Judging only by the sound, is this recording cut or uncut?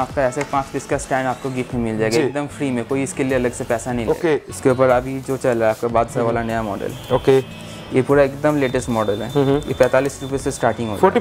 cut